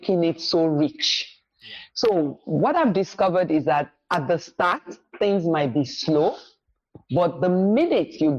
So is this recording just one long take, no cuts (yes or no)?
yes